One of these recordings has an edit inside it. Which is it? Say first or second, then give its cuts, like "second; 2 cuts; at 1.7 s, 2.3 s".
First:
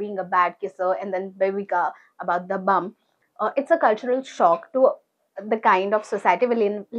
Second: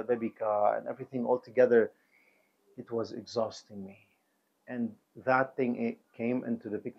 first; 1 cut; at 3.2 s